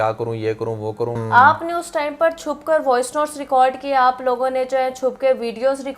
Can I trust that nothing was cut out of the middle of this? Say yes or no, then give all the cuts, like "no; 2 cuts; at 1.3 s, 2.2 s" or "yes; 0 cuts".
no; 1 cut; at 1.2 s